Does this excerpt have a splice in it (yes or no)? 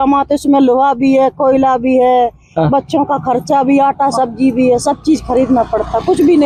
no